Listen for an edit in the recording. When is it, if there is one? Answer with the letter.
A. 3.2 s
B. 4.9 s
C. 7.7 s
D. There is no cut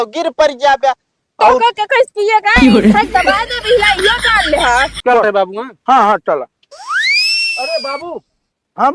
B